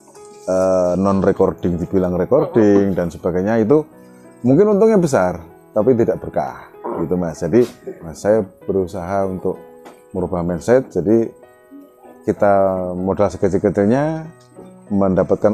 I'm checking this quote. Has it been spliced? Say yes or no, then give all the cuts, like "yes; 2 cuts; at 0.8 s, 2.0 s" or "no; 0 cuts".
yes; 1 cut; at 8.1 s